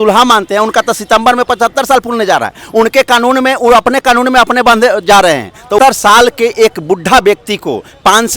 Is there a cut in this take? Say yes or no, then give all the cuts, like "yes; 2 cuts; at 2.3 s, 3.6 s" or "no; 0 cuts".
yes; 1 cut; at 5.8 s